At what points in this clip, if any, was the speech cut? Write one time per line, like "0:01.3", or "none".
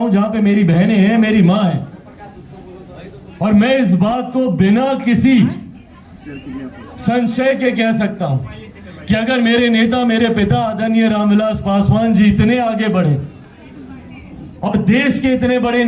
none